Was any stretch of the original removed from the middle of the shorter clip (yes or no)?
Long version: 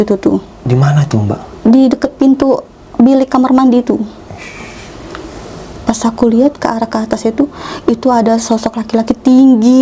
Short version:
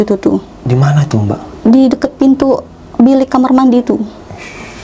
no